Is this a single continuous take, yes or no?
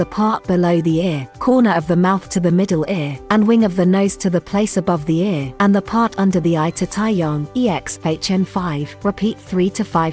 no